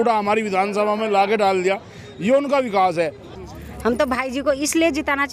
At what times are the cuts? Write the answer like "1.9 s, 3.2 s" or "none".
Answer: 3.5 s